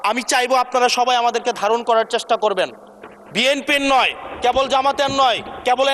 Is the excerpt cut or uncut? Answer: uncut